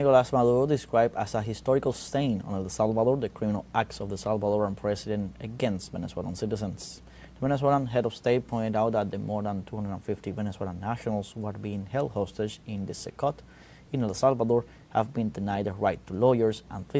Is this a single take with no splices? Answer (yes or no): yes